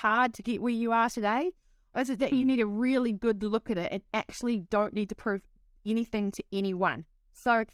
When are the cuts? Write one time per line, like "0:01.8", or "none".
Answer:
none